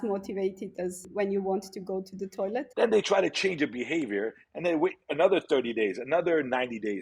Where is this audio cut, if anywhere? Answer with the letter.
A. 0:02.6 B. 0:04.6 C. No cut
A